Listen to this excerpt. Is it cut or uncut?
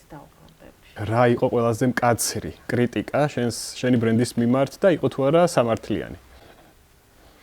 cut